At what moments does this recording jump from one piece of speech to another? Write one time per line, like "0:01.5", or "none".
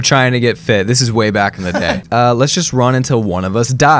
0:01.7